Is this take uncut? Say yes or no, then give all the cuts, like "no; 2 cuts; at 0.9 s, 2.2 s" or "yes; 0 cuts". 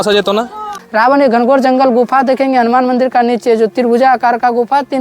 no; 1 cut; at 0.9 s